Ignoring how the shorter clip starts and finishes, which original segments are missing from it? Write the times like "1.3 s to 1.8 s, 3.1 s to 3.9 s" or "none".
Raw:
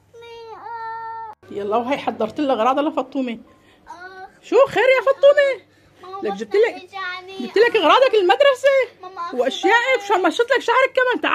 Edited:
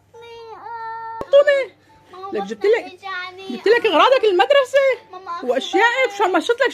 1.3 s to 5.2 s